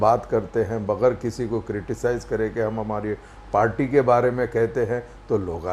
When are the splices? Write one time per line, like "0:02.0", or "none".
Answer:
none